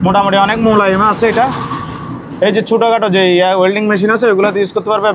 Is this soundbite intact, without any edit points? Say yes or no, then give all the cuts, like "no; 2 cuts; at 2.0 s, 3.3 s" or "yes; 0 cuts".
yes; 0 cuts